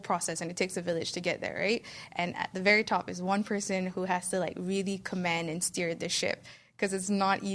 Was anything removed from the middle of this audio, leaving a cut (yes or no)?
no